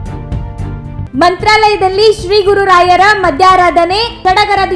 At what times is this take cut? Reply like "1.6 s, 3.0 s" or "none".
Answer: none